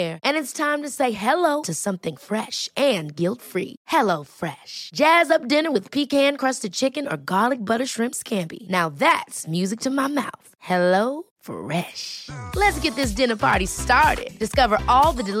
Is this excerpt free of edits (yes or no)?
yes